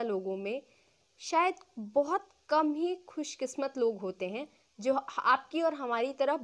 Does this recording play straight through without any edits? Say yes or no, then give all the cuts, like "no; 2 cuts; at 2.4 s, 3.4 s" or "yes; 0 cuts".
yes; 0 cuts